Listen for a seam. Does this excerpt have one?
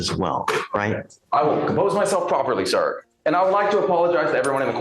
no; 0 cuts

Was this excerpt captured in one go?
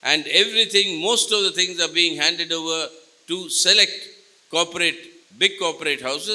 yes; 0 cuts

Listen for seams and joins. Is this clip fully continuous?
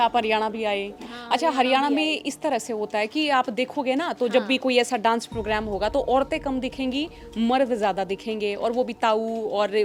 yes; 0 cuts

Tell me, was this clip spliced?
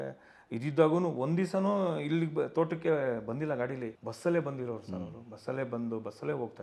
yes; 1 cut; at 4.0 s

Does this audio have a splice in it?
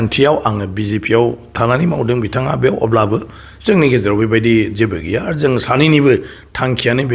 no; 0 cuts

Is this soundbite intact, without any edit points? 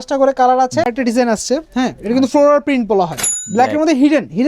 no; 2 cuts; at 0.9 s, 3.4 s

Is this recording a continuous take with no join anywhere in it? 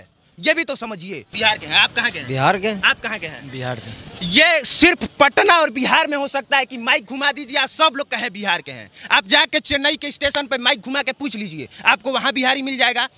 no; 1 cut; at 1.2 s

